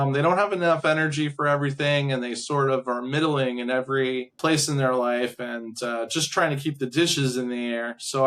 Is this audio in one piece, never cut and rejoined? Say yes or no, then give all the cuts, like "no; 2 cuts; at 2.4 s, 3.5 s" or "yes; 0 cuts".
no; 1 cut; at 4.3 s